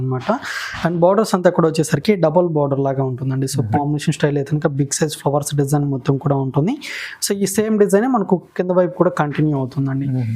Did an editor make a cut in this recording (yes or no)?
yes